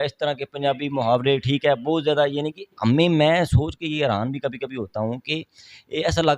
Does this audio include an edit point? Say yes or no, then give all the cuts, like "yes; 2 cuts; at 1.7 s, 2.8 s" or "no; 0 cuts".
no; 0 cuts